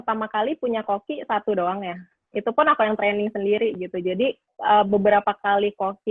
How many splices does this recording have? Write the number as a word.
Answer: one